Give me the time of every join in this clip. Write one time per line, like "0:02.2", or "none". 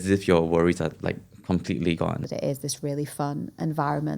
0:02.2